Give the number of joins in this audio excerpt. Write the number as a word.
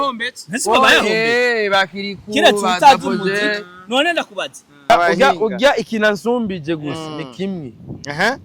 one